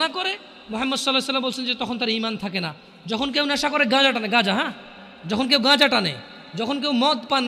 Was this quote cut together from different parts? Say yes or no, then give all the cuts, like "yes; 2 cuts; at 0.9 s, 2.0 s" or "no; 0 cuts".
no; 0 cuts